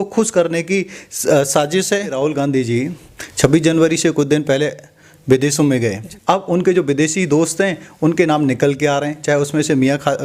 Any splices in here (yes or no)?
yes